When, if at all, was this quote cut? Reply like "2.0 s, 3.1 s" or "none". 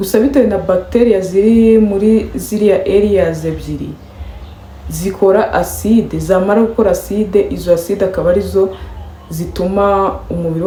none